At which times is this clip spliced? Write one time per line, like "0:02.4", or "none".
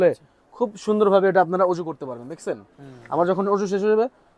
none

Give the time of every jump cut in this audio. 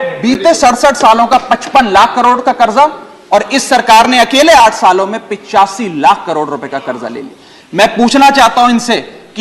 none

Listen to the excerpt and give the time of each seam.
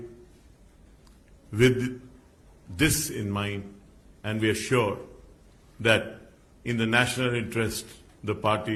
none

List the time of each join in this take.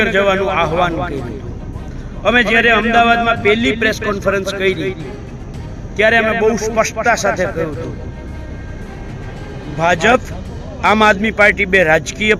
none

